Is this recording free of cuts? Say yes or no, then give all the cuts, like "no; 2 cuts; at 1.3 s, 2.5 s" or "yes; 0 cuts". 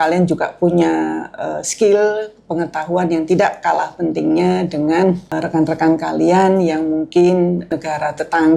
no; 2 cuts; at 5.2 s, 7.7 s